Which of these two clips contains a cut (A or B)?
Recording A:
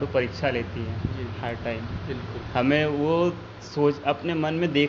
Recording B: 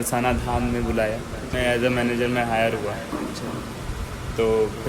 B